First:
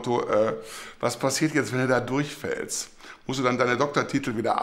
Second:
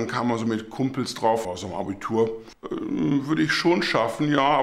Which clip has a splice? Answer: second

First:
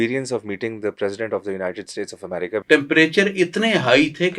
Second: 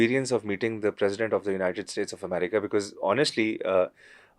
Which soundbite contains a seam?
first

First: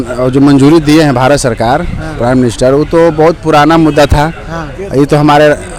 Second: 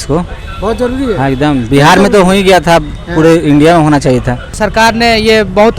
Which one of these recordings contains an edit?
second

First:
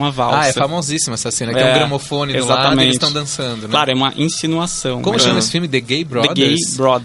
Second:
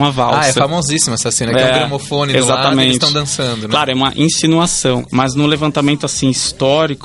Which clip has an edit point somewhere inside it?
second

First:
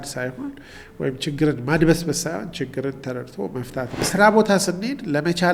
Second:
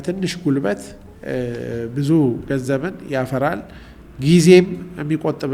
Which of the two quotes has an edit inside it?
first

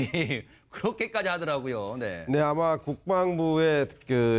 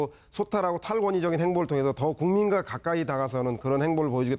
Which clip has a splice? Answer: first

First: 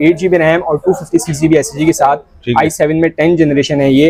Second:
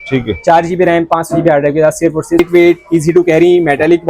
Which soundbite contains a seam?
second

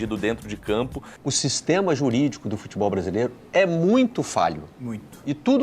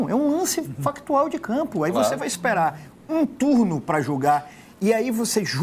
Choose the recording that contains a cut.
first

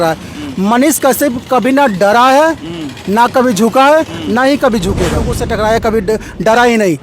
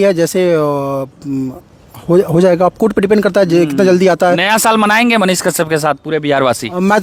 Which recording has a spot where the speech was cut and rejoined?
first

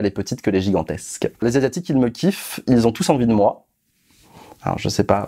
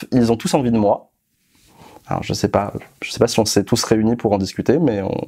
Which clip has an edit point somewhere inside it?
first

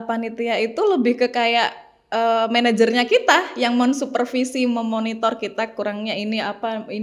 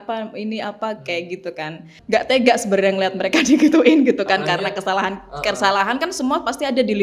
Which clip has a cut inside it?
second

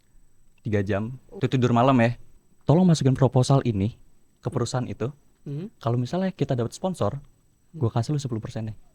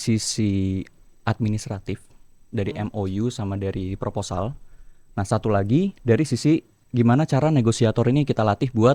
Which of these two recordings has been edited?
first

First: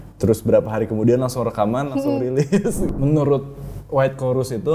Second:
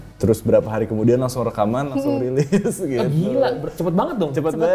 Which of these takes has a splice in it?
first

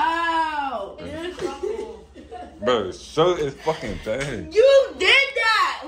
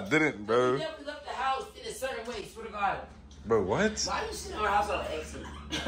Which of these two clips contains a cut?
first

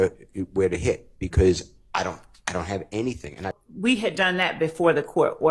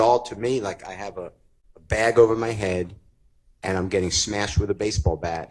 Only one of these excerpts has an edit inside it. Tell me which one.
first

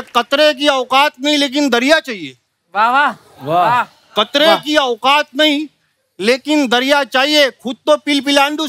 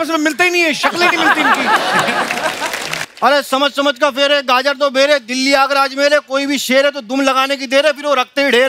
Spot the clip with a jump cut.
second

